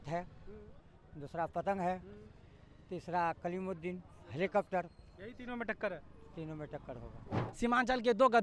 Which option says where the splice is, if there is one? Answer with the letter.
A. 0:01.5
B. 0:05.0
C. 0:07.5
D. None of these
C